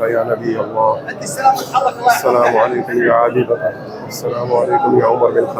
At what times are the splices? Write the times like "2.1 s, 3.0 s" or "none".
none